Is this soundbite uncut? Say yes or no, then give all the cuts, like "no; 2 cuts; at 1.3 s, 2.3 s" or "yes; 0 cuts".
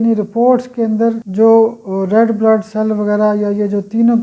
no; 1 cut; at 1.2 s